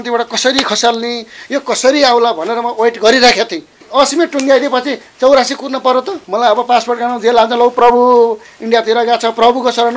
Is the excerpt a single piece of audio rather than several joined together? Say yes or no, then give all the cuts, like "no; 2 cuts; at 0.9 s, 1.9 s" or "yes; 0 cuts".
no; 2 cuts; at 3.8 s, 6.2 s